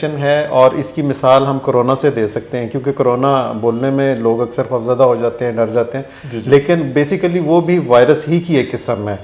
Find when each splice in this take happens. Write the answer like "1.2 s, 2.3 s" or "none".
none